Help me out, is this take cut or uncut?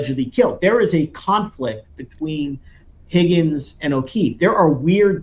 uncut